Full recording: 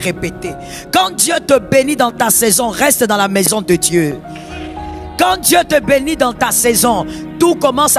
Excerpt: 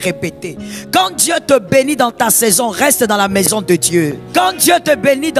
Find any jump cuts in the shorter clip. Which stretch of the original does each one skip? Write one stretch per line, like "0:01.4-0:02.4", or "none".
0:04.2-0:05.1